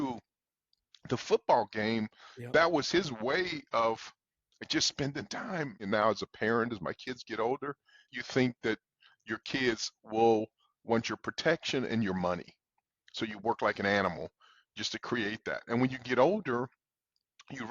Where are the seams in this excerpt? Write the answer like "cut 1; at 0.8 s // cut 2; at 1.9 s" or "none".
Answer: cut 1; at 5.8 s // cut 2; at 8.0 s